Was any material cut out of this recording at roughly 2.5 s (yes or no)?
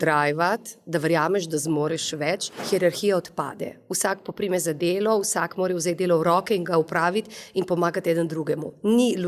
yes